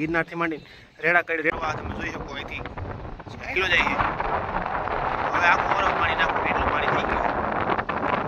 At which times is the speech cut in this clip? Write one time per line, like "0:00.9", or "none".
0:01.5